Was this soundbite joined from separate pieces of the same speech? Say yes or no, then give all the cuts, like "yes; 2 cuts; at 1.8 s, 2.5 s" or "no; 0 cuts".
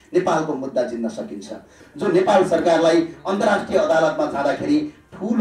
yes; 1 cut; at 1.8 s